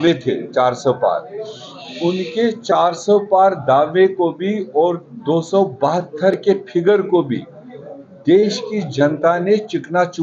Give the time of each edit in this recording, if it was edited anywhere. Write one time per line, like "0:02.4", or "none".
none